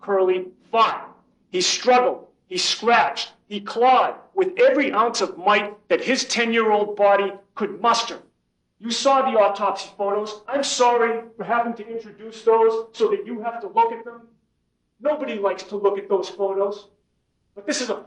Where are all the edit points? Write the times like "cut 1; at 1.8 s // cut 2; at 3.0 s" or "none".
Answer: none